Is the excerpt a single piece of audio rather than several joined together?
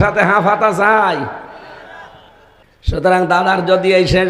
no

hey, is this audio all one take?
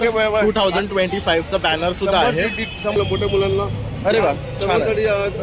no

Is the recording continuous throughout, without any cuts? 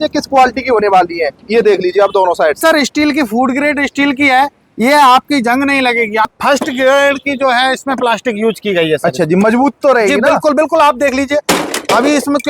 no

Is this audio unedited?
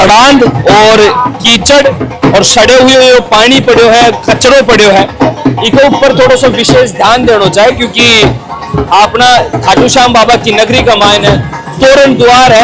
yes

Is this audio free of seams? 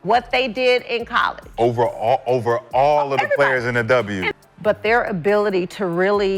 yes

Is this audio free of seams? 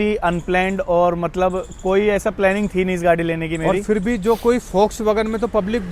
yes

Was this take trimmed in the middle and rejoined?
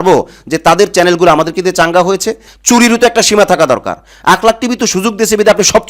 yes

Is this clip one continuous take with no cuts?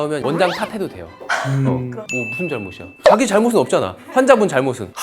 no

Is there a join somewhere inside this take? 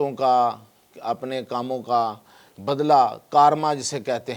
no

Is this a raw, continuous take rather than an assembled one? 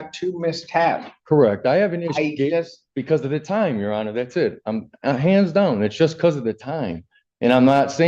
yes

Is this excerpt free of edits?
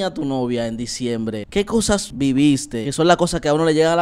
no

